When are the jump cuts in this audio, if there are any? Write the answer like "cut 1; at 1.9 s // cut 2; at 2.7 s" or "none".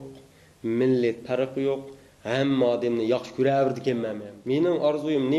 cut 1; at 4.3 s